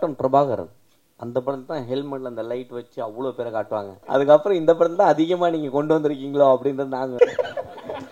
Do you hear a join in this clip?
yes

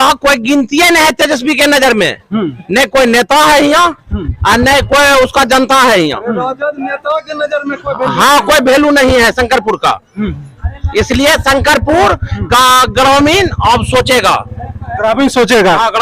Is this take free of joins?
yes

